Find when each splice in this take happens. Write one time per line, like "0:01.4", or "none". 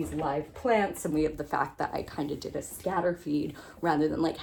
none